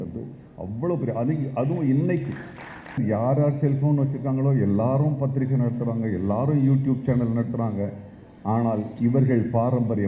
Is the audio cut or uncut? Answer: cut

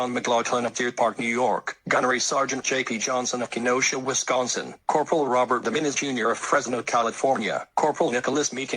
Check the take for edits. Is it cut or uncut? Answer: cut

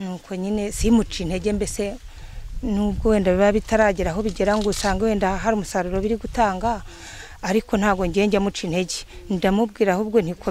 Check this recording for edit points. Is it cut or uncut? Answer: uncut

